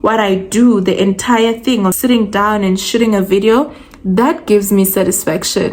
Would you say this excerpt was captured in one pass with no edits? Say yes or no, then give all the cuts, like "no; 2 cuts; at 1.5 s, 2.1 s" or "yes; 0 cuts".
no; 1 cut; at 2.0 s